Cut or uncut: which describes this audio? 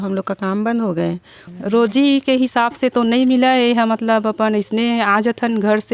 cut